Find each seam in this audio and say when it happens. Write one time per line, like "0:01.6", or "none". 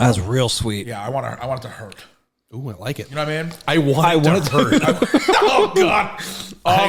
none

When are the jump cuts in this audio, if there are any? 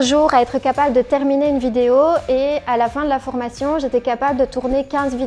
none

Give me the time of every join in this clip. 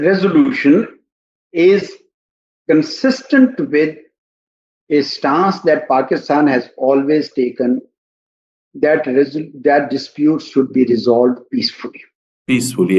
none

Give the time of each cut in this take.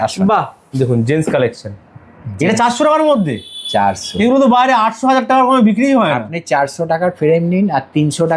none

